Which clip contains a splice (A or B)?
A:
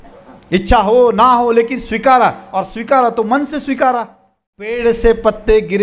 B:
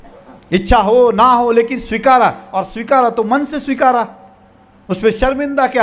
A